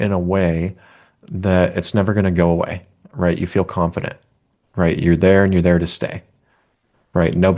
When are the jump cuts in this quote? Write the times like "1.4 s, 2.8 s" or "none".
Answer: none